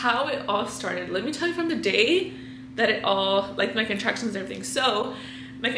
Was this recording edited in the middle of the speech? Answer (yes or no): no